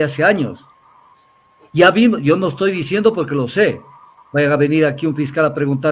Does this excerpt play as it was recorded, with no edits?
yes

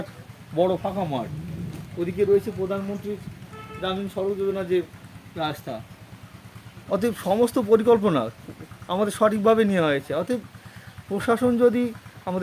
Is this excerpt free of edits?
yes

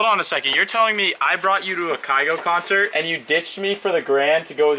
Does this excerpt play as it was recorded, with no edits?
no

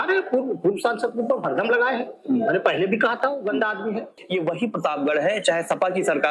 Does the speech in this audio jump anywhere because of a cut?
yes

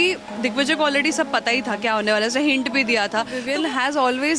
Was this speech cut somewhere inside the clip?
yes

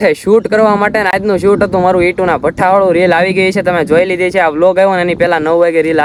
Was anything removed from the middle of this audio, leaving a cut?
no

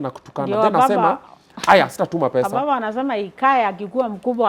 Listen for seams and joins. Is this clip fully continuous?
yes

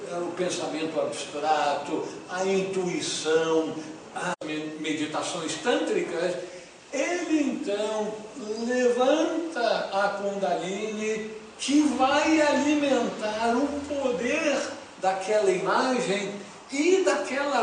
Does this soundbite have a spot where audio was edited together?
no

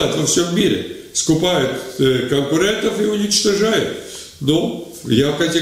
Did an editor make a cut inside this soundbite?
no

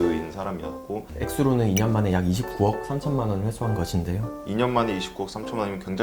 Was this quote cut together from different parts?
yes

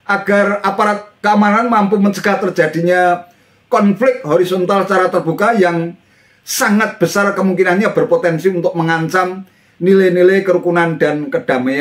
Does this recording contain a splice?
no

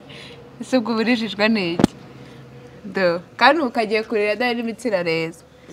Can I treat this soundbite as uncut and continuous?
yes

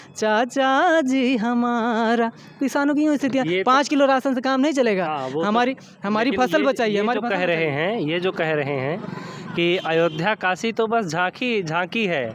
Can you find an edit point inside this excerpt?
no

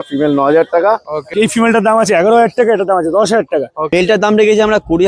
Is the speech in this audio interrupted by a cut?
yes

